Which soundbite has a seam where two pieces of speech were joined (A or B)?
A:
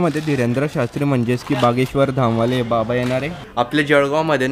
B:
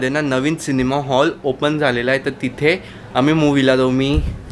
A